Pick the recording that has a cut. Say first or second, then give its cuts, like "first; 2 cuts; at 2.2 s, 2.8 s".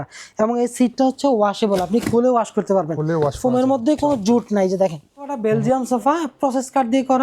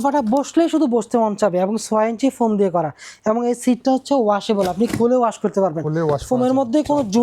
first; 1 cut; at 5.3 s